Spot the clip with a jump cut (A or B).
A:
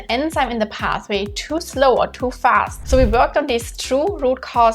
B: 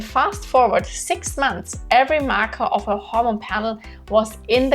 A